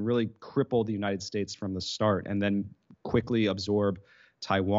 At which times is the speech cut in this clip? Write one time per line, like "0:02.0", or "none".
none